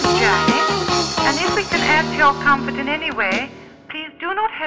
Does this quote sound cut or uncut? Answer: cut